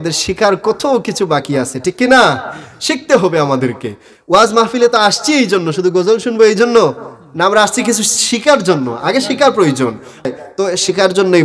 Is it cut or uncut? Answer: cut